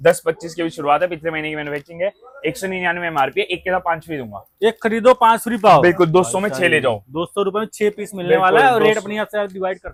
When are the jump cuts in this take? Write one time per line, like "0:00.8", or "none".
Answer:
none